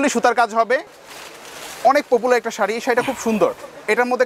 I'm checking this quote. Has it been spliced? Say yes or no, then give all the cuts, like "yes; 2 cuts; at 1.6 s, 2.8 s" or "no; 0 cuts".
yes; 1 cut; at 0.9 s